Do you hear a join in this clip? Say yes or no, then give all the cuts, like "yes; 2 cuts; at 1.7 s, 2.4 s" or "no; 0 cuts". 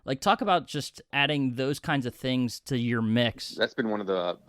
yes; 2 cuts; at 1.1 s, 3.4 s